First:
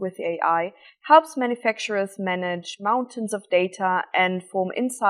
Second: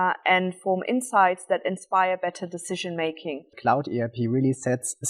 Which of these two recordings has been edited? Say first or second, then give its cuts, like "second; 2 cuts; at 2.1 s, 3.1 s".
second; 1 cut; at 3.6 s